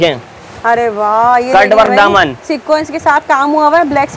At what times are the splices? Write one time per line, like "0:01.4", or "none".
none